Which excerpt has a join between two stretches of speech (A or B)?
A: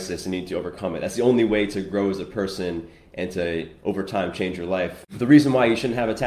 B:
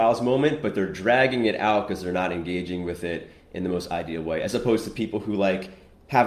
A